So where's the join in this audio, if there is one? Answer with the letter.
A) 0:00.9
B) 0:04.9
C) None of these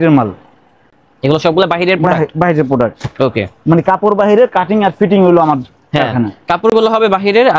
C